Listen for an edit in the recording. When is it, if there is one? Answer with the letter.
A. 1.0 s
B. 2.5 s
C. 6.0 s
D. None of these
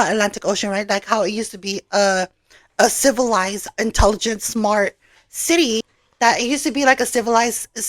C